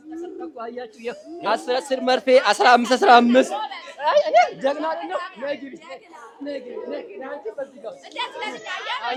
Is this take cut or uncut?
uncut